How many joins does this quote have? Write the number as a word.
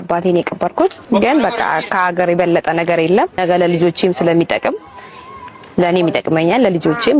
two